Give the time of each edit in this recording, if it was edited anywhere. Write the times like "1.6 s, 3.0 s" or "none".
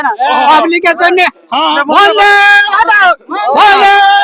1.8 s